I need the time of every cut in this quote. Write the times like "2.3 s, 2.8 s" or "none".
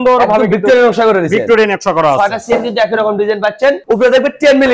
none